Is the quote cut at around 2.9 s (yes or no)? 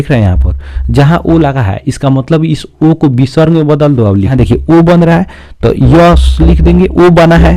no